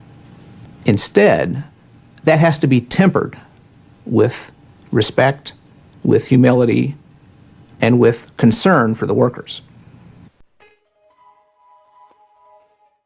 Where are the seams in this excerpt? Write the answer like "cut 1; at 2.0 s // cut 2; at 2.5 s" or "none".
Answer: cut 1; at 2.6 s